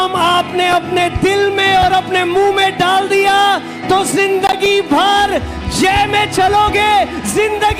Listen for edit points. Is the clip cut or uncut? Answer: uncut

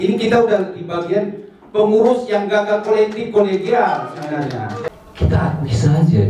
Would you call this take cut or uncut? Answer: cut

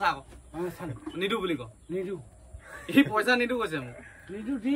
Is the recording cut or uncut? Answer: uncut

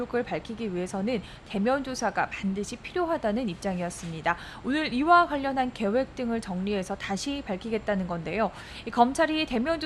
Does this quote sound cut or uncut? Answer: uncut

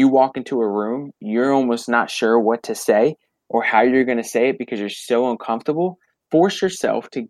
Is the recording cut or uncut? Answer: cut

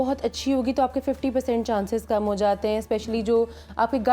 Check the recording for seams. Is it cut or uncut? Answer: uncut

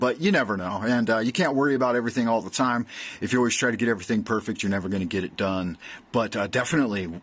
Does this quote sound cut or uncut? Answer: uncut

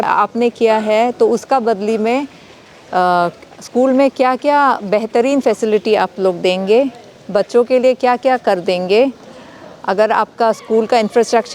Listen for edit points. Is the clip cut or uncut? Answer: uncut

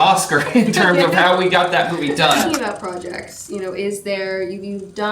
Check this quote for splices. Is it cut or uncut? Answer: cut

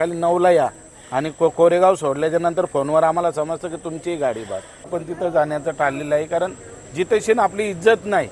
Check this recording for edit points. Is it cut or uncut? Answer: cut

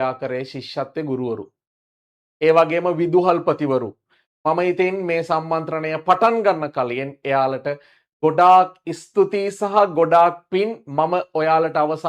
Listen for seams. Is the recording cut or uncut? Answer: uncut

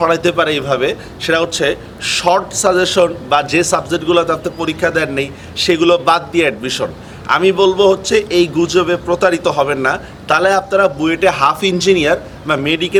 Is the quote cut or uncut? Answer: uncut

